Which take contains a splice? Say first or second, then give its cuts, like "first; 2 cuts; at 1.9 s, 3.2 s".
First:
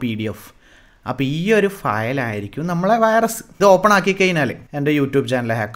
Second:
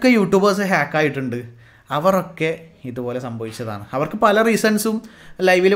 first; 2 cuts; at 3.5 s, 4.6 s